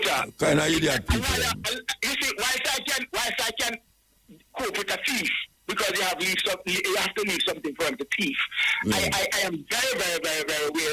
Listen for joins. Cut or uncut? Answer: uncut